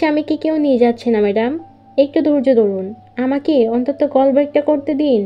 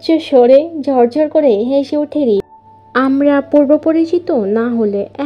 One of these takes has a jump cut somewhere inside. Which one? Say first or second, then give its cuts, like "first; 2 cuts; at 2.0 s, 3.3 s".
second; 1 cut; at 2.4 s